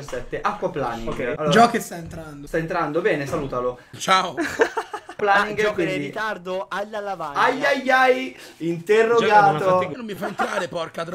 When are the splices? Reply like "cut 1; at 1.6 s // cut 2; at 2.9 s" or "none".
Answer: none

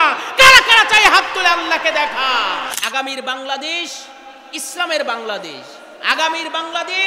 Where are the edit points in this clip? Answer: cut 1; at 2.8 s

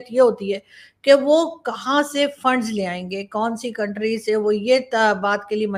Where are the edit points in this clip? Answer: none

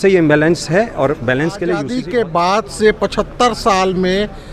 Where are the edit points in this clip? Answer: cut 1; at 1.9 s

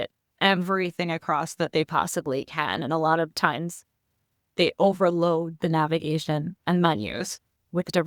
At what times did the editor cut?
none

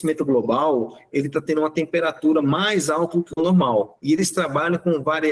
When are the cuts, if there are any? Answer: none

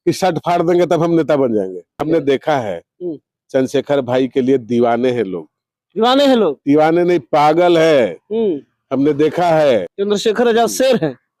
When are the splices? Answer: cut 1; at 1.9 s // cut 2; at 9.9 s

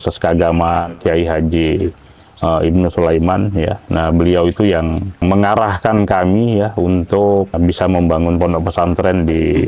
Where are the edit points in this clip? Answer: cut 1; at 0.9 s // cut 2; at 5.2 s // cut 3; at 7.6 s

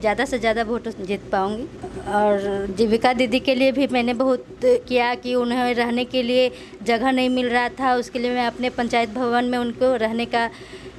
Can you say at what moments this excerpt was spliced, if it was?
none

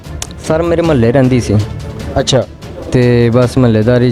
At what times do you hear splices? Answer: none

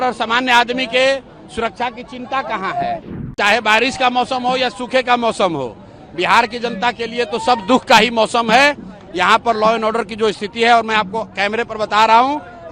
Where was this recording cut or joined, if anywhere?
cut 1; at 3.2 s

